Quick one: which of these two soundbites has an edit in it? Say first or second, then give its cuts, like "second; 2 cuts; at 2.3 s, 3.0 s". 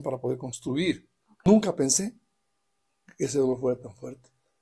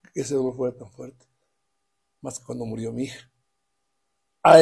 first; 1 cut; at 1.5 s